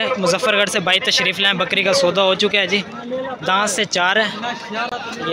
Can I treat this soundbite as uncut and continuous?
yes; 0 cuts

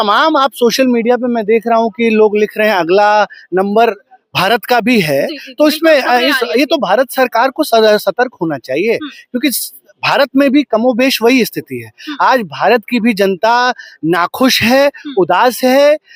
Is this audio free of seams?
yes; 0 cuts

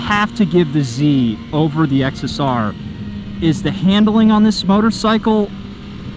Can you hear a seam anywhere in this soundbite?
no; 0 cuts

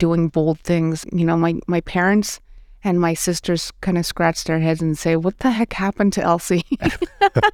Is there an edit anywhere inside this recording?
yes; 1 cut; at 1.0 s

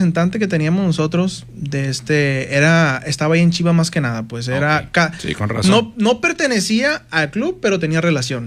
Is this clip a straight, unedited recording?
yes; 0 cuts

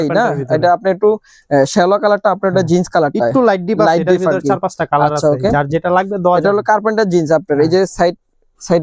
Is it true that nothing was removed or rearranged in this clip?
yes; 0 cuts

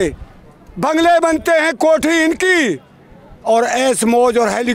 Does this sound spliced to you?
no; 0 cuts

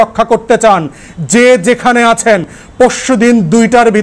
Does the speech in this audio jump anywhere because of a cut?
no; 0 cuts

